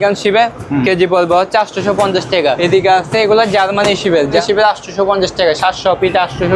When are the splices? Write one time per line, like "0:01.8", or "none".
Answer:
0:02.6
0:04.4